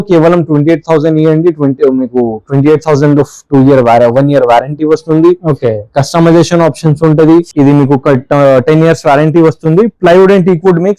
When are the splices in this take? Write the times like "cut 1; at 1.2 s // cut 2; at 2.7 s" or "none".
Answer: cut 1; at 7.5 s

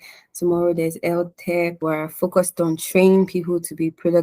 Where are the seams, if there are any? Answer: cut 1; at 1.8 s

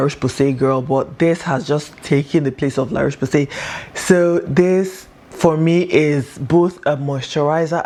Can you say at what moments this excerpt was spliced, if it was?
none

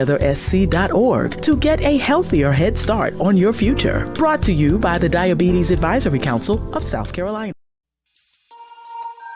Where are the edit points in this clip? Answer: cut 1; at 7.5 s

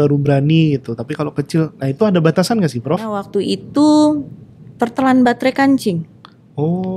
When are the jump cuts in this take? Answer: cut 1; at 3.2 s

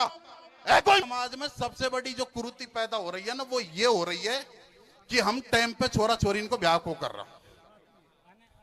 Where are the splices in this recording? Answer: cut 1; at 1.0 s

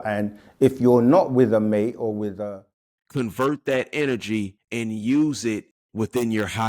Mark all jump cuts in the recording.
cut 1; at 2.4 s // cut 2; at 4.6 s // cut 3; at 5.8 s

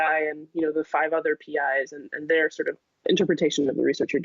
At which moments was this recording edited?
cut 1; at 3.0 s

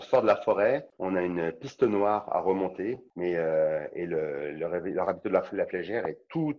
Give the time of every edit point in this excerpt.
cut 1; at 0.9 s // cut 2; at 3.1 s

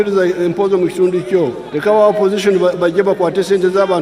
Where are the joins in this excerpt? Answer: cut 1; at 1.7 s

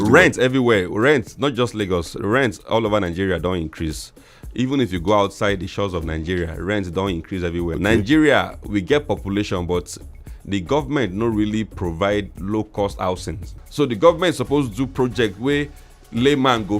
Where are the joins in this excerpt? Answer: cut 1; at 7.7 s // cut 2; at 13.6 s

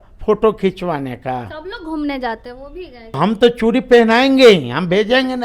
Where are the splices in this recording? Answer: cut 1; at 3.2 s

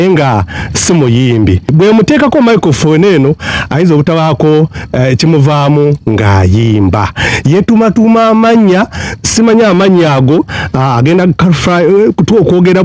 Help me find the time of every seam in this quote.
cut 1; at 1.7 s

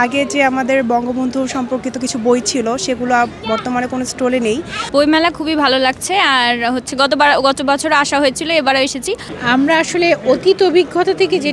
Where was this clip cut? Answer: cut 1; at 4.7 s // cut 2; at 9.3 s

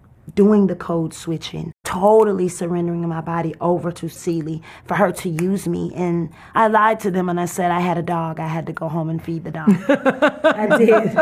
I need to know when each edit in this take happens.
cut 1; at 1.8 s // cut 2; at 4.2 s // cut 3; at 6.4 s

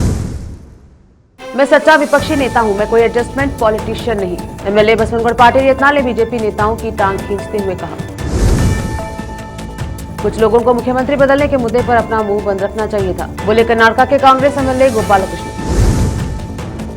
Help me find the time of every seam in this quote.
cut 1; at 1.2 s

